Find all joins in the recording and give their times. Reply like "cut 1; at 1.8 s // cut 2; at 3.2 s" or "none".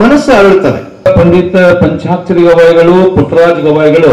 cut 1; at 1.1 s